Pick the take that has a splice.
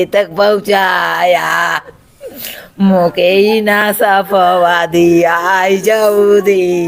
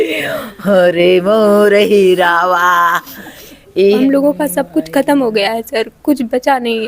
second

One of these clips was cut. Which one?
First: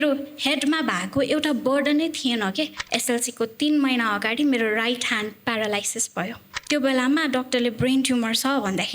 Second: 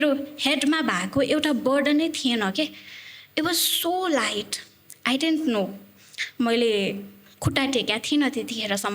first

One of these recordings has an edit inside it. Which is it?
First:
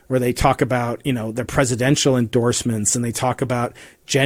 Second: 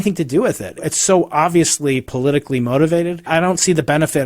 second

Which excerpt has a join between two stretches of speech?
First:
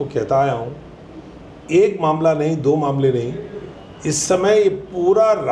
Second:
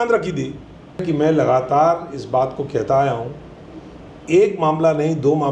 second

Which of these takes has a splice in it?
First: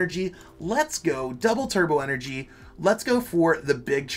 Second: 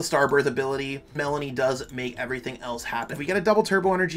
second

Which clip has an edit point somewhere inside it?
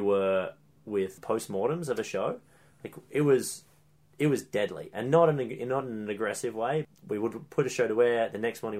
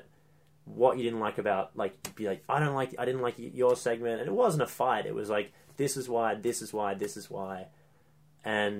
first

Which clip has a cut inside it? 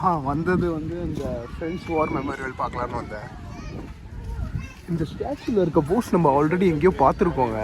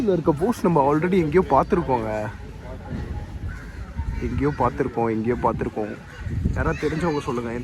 first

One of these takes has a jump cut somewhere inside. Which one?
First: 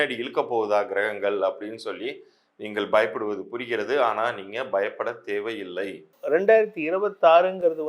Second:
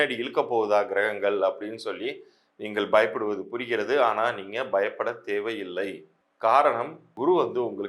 first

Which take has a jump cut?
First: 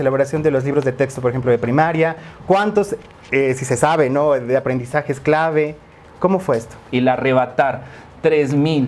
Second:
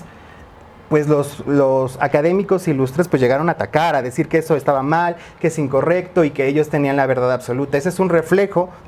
first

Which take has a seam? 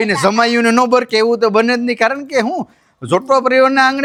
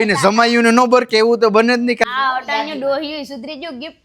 second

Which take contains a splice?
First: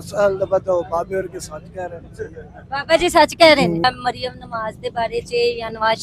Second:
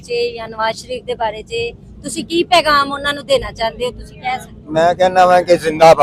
first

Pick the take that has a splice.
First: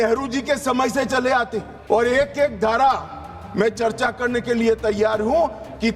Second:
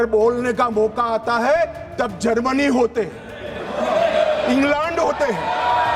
first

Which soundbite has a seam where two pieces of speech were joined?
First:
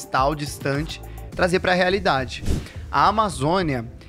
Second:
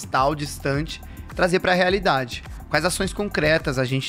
first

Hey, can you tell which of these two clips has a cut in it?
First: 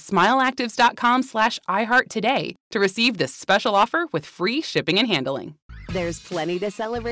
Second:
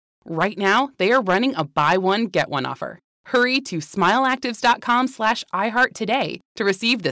first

